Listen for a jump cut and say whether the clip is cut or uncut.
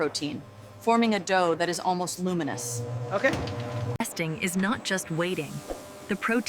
uncut